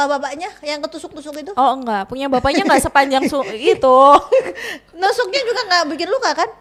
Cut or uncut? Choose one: uncut